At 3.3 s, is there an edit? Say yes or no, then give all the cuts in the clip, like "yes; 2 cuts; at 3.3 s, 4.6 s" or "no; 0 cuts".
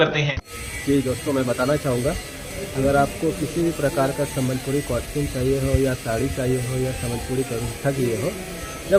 no; 0 cuts